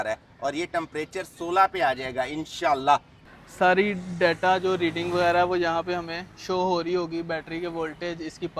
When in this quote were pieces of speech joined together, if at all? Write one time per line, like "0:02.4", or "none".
0:03.3